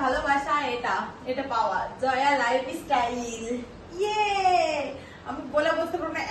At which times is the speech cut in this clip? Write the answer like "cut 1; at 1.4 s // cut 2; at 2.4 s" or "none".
none